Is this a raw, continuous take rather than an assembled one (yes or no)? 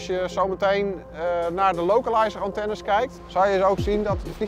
no